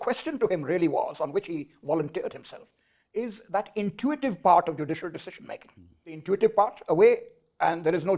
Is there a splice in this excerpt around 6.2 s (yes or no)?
yes